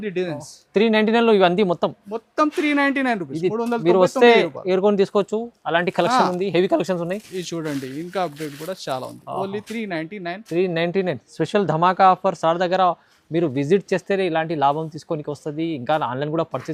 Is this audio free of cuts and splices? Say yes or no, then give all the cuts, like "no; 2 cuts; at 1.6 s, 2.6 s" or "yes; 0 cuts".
yes; 0 cuts